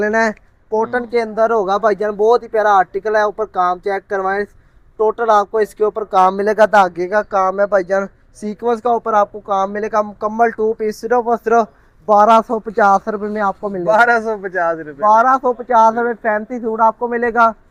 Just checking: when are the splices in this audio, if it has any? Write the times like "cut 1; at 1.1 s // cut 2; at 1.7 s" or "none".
none